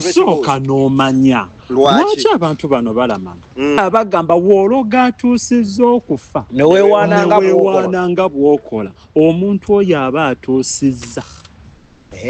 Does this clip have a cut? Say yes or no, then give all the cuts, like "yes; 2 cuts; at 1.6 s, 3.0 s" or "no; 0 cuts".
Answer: yes; 1 cut; at 3.8 s